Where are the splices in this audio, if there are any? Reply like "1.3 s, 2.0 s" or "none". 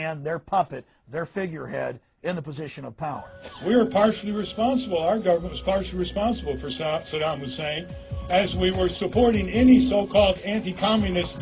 3.9 s